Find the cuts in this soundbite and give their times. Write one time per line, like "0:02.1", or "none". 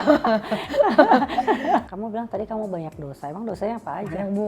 0:01.9